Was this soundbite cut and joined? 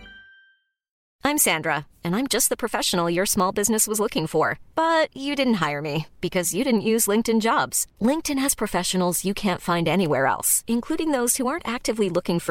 yes; 1 cut; at 1.0 s

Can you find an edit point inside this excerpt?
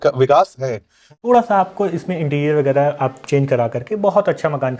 yes; 1 cut; at 1.3 s

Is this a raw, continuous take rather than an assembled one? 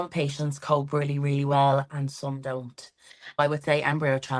no; 1 cut; at 3.4 s

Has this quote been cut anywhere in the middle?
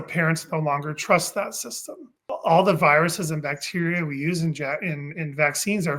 yes; 1 cut; at 2.3 s

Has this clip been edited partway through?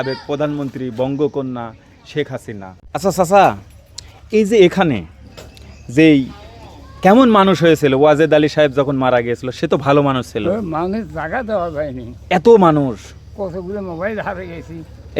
yes; 1 cut; at 2.7 s

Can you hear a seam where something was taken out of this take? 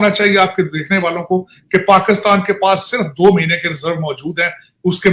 no; 0 cuts

